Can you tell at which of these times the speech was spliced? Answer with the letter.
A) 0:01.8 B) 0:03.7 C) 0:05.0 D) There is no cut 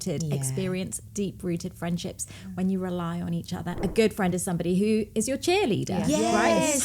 B